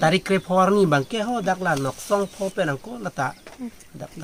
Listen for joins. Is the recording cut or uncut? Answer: uncut